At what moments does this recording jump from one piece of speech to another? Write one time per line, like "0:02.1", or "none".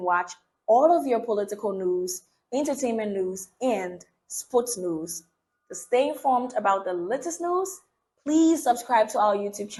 none